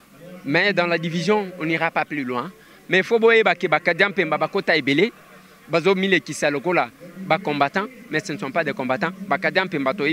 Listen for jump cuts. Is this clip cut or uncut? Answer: uncut